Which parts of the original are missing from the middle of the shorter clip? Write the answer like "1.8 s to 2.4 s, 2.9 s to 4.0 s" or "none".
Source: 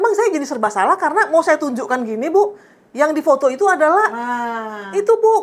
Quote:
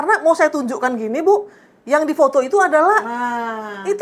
none